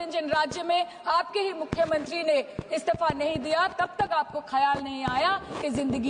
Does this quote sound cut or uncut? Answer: uncut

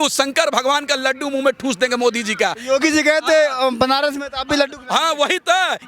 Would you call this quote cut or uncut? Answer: uncut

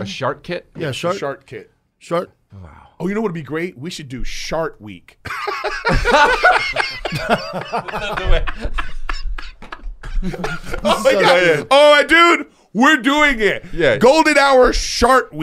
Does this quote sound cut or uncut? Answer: uncut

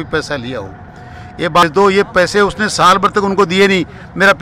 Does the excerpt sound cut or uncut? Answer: cut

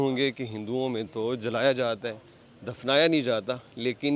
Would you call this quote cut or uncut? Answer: uncut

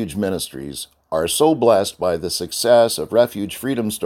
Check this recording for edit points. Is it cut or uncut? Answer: uncut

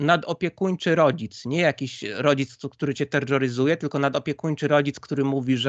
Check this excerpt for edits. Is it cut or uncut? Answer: uncut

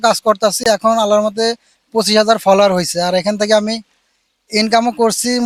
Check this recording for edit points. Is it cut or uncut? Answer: uncut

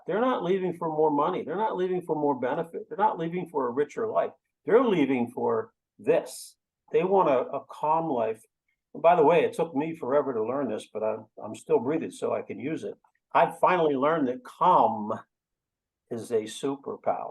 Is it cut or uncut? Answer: uncut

